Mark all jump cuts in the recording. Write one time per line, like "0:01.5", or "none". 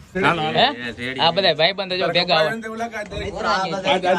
none